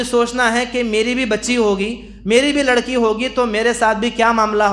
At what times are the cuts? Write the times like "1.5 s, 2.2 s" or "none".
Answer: none